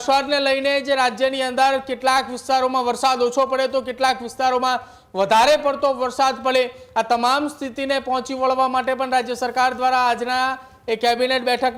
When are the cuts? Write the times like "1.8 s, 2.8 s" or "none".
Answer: none